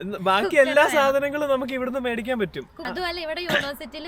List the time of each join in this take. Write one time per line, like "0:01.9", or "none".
0:02.8